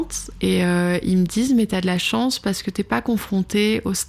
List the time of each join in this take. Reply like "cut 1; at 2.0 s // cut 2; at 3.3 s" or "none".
none